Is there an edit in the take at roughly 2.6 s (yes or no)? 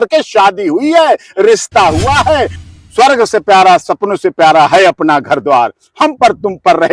yes